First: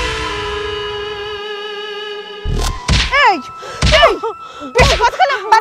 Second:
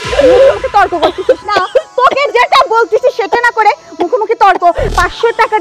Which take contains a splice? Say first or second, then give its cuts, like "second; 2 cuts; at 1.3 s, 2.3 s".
first; 1 cut; at 2.6 s